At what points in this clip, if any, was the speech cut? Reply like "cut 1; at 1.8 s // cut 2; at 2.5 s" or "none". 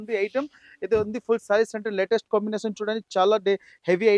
none